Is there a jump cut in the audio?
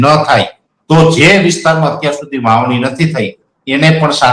no; 0 cuts

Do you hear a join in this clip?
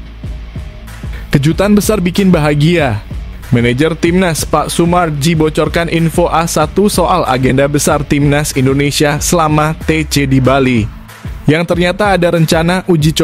yes; 1 cut; at 1.3 s

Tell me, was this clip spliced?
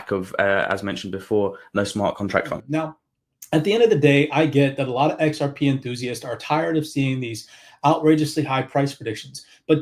yes; 1 cut; at 2.6 s

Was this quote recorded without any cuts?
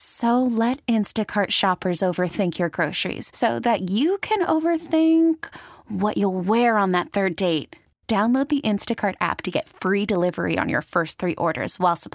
yes; 0 cuts

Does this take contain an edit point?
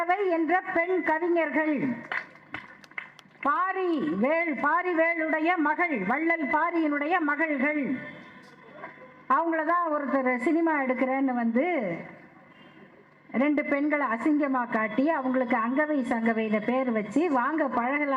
no; 0 cuts

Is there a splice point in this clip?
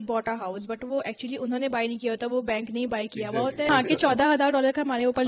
yes; 1 cut; at 3.7 s

